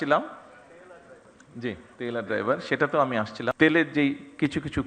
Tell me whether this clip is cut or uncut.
cut